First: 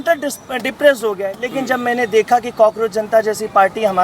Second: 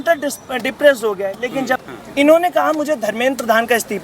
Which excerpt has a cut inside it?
second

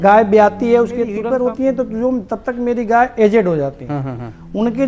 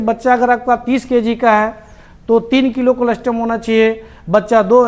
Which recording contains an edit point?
first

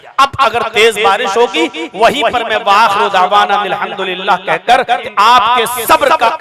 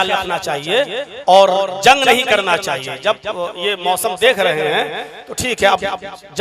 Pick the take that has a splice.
first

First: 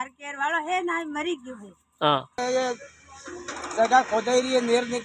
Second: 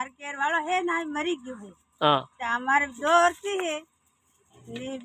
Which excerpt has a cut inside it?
first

